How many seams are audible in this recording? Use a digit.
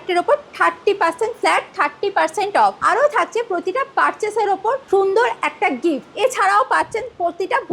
3